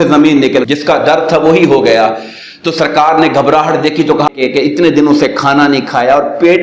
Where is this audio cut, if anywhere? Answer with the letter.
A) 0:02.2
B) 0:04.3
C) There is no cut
B